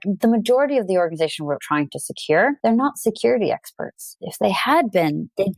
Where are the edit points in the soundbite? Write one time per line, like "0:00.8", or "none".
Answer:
0:02.6
0:04.1